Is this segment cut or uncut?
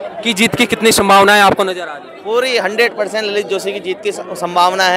uncut